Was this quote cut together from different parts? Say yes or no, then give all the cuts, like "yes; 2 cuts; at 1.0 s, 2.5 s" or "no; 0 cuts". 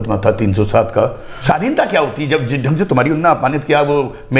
yes; 1 cut; at 1.3 s